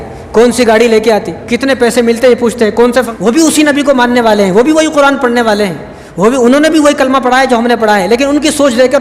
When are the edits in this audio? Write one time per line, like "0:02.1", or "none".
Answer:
0:03.1